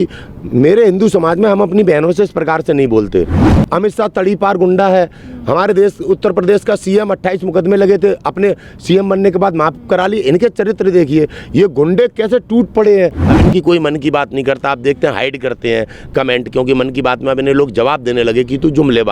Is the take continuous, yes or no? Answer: no